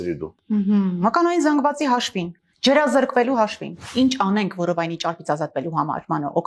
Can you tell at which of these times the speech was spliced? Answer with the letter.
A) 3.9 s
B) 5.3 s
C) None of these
A